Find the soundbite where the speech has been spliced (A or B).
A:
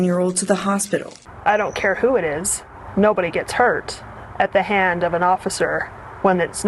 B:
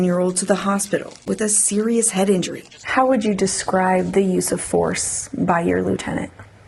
A